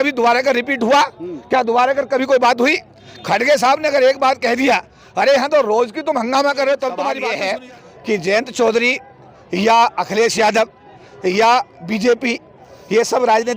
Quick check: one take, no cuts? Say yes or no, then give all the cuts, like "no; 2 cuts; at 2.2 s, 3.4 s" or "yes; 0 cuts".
no; 1 cut; at 7.2 s